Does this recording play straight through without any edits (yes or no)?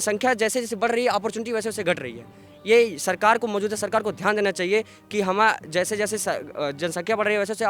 yes